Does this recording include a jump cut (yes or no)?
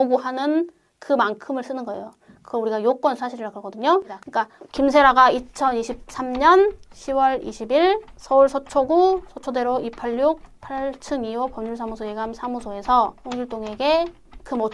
yes